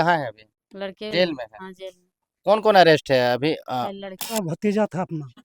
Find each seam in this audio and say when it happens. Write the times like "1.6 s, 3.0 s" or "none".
1.1 s, 4.3 s